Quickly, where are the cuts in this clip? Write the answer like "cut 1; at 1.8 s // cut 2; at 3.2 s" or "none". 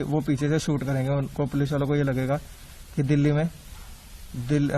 none